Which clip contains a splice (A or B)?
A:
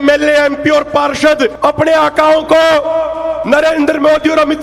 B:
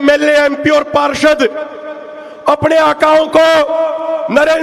A